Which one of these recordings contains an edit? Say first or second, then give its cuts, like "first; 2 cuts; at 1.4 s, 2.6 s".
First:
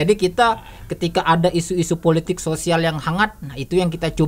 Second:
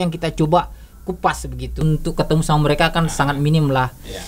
second; 1 cut; at 1.8 s